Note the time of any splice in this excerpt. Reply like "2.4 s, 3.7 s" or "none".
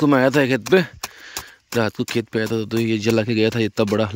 none